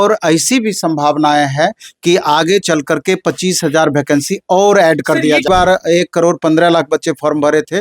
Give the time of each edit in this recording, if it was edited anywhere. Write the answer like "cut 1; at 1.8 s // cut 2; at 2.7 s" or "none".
cut 1; at 5.5 s